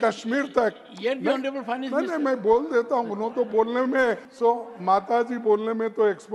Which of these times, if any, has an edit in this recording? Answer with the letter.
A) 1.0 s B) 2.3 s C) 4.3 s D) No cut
C